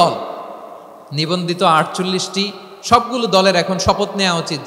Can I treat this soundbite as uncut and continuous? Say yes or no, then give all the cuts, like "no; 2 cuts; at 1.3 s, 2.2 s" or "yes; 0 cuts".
yes; 0 cuts